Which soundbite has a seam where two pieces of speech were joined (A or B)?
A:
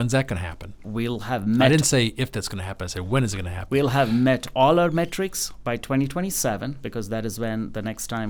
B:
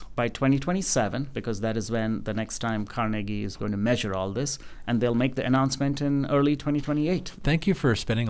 B